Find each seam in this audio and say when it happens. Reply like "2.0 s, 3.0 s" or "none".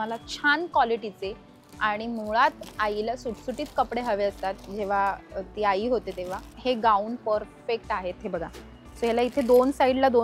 6.5 s